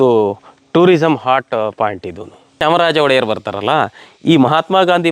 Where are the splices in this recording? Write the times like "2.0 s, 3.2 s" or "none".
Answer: 2.6 s

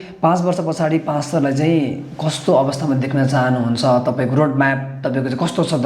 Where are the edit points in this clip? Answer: none

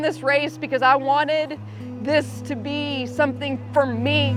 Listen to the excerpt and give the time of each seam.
none

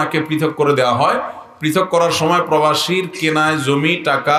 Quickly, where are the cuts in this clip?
none

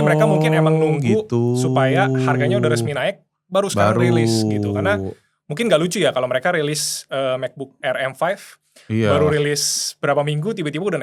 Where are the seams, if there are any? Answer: none

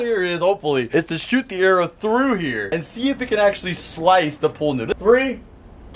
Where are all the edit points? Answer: 4.9 s

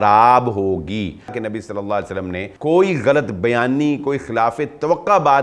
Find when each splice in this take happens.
1.4 s, 2.5 s

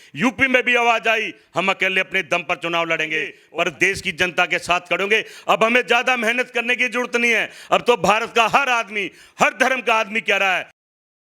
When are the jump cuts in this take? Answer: 3.3 s

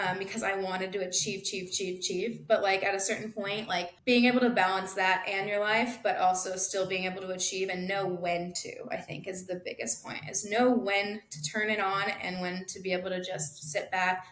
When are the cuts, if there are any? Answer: 3.9 s

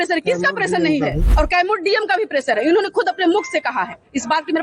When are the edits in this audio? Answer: 1.2 s

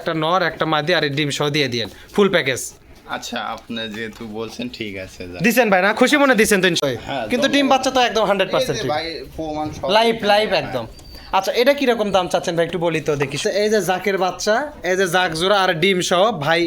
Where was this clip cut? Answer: 6.8 s, 13.4 s

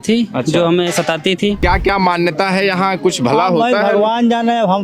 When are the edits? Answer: 1.6 s

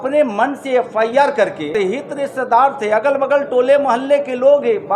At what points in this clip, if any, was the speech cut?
1.7 s

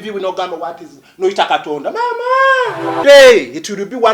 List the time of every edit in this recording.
3.0 s

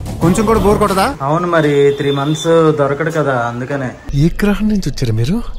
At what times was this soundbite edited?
1.2 s

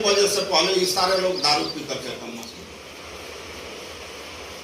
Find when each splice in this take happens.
2.5 s

